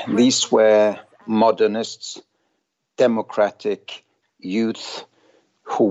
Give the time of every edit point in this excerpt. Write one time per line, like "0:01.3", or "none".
0:01.2